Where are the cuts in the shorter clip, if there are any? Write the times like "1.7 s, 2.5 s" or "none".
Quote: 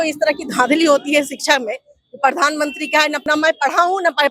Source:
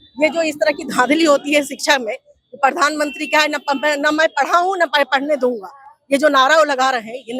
3.2 s

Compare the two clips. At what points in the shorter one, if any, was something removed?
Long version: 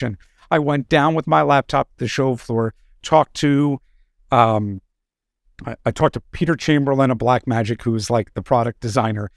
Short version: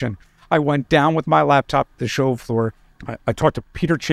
2.9 s

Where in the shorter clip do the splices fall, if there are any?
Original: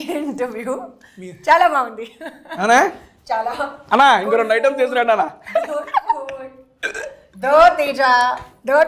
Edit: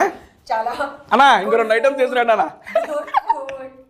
none

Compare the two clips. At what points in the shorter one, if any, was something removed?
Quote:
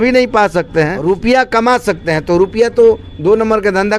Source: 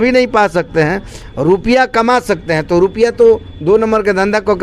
1.0 s

